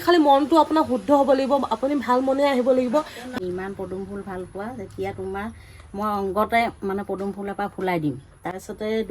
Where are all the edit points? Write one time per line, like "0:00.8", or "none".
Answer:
0:03.3